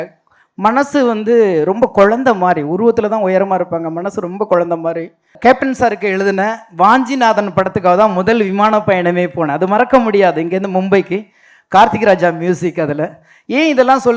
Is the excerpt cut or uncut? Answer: cut